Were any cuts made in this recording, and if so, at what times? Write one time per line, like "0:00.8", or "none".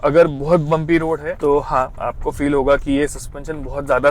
0:01.3
0:01.9